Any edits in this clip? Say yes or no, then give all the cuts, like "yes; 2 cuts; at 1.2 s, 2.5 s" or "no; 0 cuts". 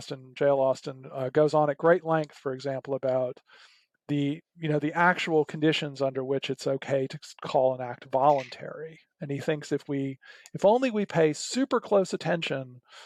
no; 0 cuts